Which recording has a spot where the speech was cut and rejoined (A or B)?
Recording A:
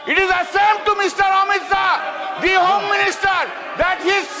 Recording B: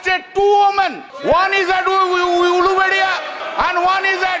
B